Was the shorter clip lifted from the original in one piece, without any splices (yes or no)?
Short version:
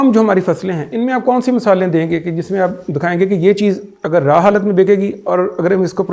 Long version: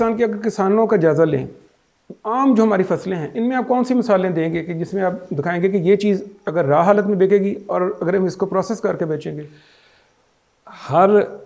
yes